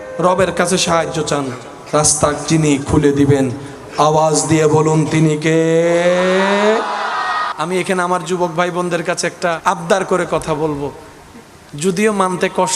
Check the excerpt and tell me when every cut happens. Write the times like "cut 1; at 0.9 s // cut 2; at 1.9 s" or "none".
cut 1; at 7.5 s // cut 2; at 9.6 s